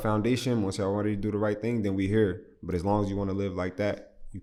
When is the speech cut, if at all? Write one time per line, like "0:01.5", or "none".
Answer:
none